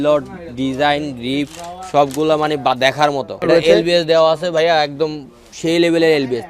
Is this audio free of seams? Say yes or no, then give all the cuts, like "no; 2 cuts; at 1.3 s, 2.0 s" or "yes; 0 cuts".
no; 1 cut; at 3.4 s